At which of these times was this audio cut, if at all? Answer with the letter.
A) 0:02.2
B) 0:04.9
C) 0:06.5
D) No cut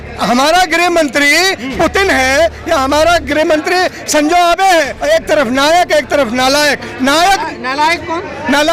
B